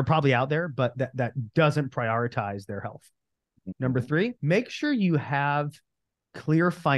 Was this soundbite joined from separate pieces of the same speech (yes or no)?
yes